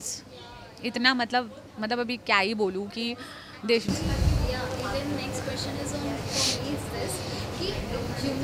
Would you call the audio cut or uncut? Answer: uncut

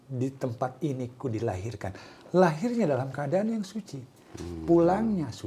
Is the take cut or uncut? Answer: uncut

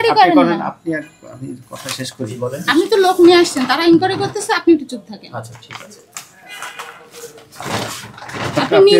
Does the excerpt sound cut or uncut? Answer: uncut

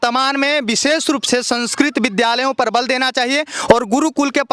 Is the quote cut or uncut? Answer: uncut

